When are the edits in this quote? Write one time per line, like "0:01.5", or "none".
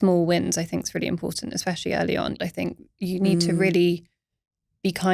0:02.4